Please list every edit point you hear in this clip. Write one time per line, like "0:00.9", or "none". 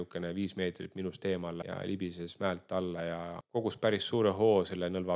0:01.6
0:03.4